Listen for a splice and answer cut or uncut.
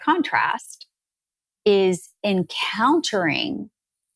uncut